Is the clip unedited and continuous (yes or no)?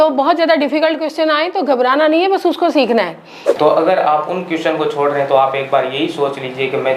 no